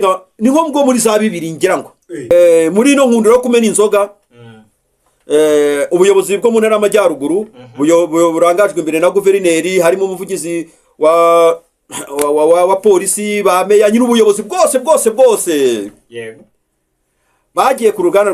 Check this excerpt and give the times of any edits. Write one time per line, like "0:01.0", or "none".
0:02.3

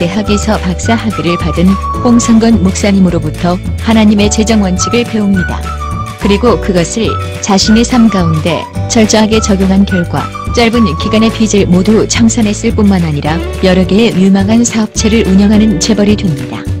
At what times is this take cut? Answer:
0:13.5

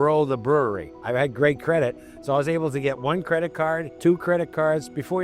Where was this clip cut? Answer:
0:00.9
0:03.9

